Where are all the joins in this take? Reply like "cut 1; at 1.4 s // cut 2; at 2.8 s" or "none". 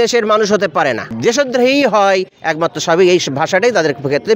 cut 1; at 1.1 s

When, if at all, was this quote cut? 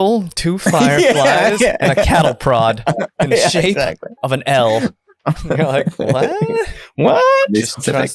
none

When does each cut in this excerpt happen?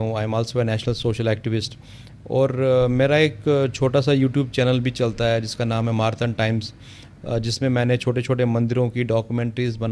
none

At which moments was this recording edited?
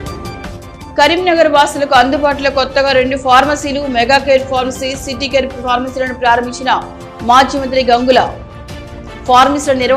cut 1; at 0.9 s

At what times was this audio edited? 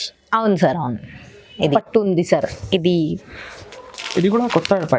cut 1; at 1.7 s

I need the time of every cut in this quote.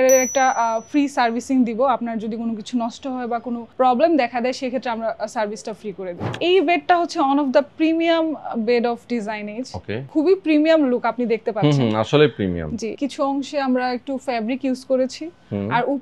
cut 1; at 6.4 s // cut 2; at 10.0 s // cut 3; at 12.9 s

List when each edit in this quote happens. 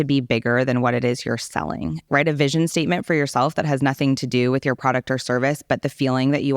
cut 1; at 2.1 s

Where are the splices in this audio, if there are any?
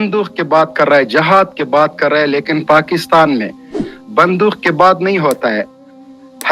none

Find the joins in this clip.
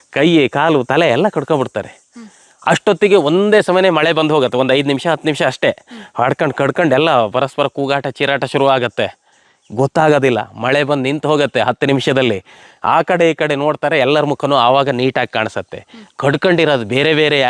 none

